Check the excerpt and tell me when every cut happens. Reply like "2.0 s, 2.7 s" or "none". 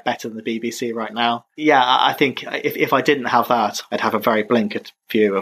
none